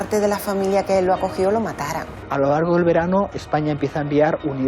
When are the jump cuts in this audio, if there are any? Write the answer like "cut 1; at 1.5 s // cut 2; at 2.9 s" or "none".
cut 1; at 2.2 s